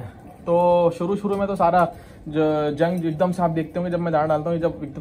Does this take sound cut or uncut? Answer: uncut